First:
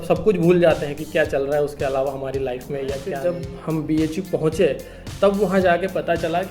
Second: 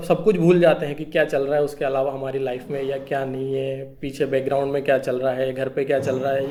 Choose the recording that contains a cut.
first; 1 cut; at 3.1 s

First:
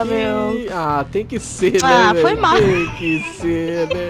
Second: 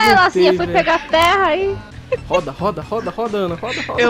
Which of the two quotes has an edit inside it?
second; 1 cut; at 1.9 s

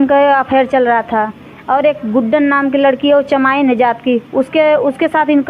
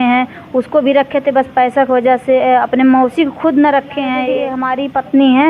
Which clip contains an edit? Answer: second; 1 cut; at 4.5 s

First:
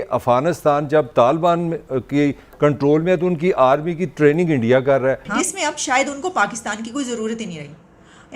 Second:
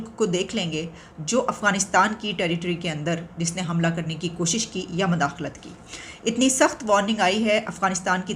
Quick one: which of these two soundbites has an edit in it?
first; 1 cut; at 5.3 s

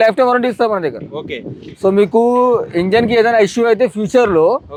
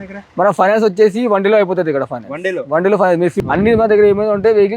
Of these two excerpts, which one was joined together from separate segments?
second; 1 cut; at 3.3 s

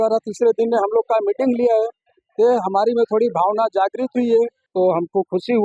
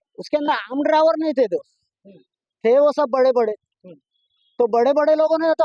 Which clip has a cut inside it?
first; 1 cut; at 4.6 s

